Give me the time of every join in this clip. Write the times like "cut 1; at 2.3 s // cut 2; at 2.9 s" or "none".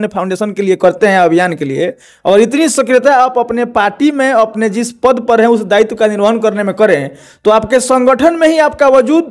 none